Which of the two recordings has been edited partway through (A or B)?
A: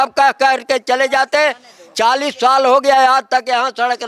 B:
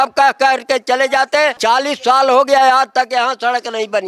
B